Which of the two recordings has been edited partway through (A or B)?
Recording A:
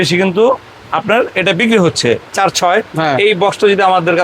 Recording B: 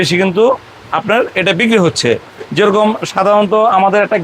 A